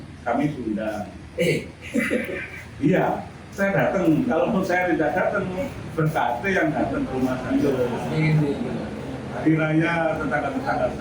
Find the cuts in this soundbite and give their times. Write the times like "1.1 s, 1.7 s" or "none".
none